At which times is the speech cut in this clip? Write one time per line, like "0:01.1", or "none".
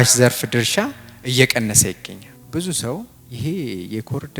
0:02.3
0:03.2